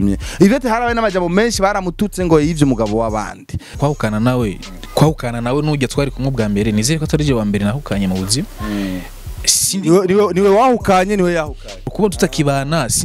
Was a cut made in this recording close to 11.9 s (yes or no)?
yes